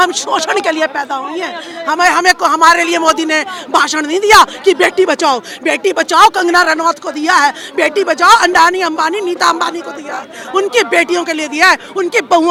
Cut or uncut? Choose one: uncut